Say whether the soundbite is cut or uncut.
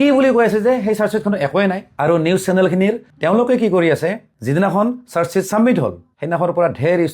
cut